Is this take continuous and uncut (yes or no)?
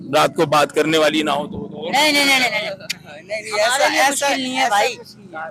yes